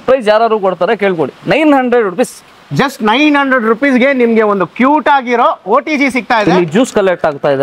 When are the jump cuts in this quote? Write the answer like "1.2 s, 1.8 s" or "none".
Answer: 6.4 s